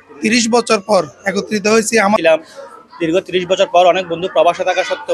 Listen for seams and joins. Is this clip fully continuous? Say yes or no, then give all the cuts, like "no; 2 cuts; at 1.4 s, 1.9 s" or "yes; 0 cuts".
no; 1 cut; at 2.2 s